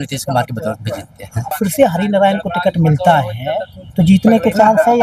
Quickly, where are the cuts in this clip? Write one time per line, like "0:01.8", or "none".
0:01.5